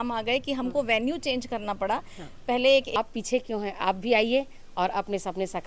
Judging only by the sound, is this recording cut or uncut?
cut